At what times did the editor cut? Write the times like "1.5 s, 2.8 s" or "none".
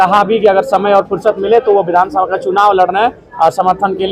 none

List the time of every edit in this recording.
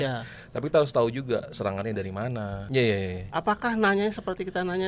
2.6 s

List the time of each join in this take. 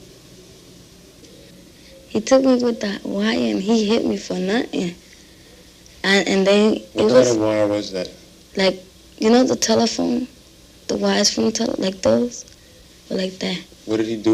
none

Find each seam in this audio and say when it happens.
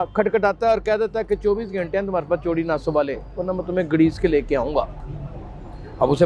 none

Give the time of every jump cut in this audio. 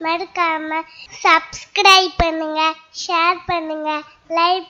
none

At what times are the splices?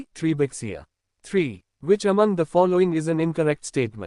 1.3 s

